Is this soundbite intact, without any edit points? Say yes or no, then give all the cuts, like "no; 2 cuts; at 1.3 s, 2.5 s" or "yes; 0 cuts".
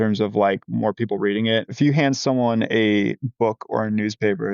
no; 1 cut; at 1.7 s